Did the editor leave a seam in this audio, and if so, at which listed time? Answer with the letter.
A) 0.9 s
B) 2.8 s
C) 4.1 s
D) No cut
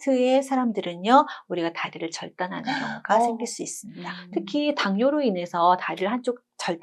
C